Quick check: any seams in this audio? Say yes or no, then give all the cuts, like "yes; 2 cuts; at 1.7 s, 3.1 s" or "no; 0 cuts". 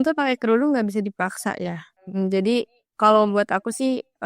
yes; 1 cut; at 1.9 s